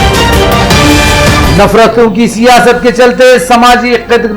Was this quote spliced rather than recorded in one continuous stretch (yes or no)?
yes